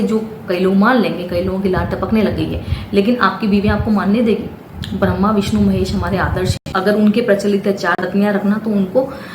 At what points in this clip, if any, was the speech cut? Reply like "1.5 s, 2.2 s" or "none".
6.8 s, 8.0 s